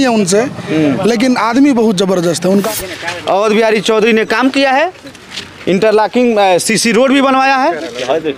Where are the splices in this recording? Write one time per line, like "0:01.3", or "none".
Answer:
0:02.7